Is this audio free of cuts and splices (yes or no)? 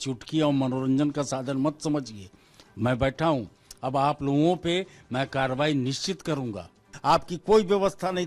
no